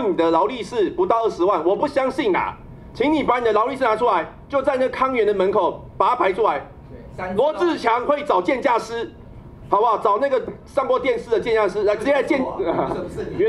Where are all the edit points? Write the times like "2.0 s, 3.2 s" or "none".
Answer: none